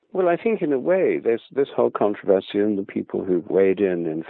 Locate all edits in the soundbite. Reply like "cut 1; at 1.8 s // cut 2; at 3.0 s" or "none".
none

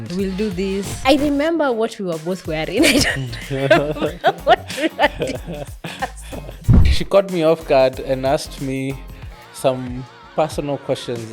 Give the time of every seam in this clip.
cut 1; at 0.9 s // cut 2; at 6.8 s

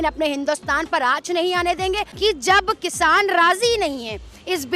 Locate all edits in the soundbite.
cut 1; at 2.1 s

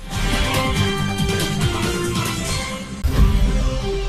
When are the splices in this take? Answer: cut 1; at 2.9 s

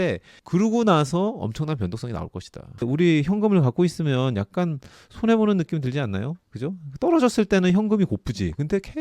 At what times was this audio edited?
cut 1; at 2.7 s

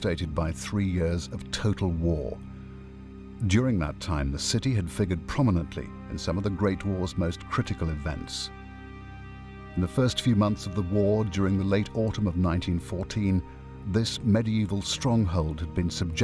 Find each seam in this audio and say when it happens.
cut 1; at 6.7 s

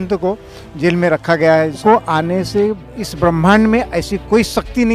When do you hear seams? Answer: cut 1; at 1.8 s

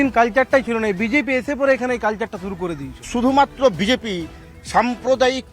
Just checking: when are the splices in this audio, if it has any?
none

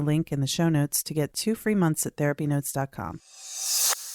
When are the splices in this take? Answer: cut 1; at 3.3 s

